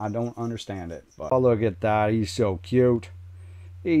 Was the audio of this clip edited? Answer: yes; 1 cut; at 1.3 s

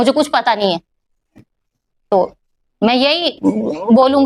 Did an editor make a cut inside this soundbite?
no; 0 cuts

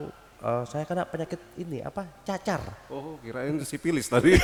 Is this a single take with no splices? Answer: yes; 0 cuts

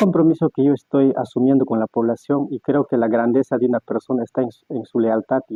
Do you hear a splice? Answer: no; 0 cuts

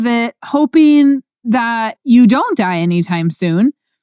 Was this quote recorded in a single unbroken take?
yes; 0 cuts

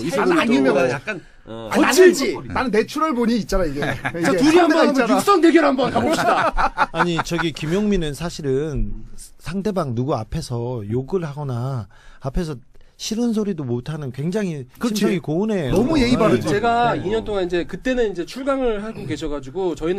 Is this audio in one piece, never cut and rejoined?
yes; 0 cuts

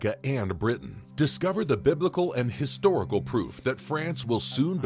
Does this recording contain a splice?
yes; 1 cut; at 1.0 s

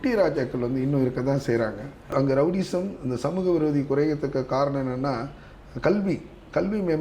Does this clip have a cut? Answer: yes; 1 cut; at 2.1 s

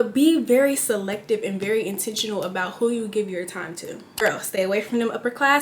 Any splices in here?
yes; 1 cut; at 4.1 s

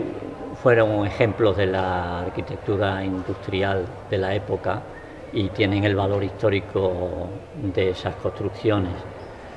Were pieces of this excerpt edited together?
yes; 1 cut; at 6.3 s

